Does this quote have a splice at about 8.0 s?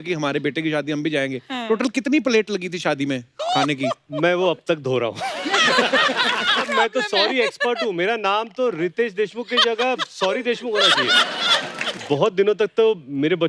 no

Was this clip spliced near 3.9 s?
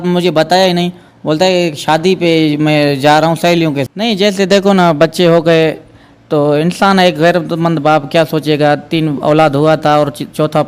yes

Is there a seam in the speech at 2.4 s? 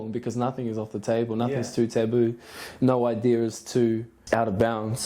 no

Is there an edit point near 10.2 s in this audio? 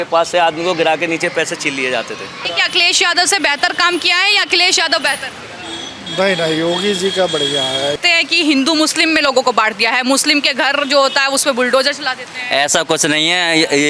no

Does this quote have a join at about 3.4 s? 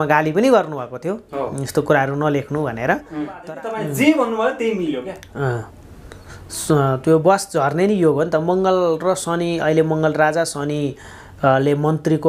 yes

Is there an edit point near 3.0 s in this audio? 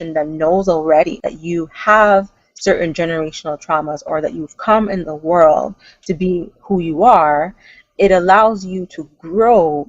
no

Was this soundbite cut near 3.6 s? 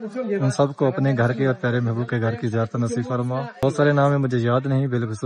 yes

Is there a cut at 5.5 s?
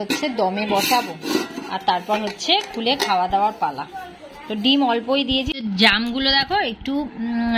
yes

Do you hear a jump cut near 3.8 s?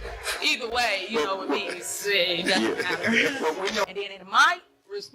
yes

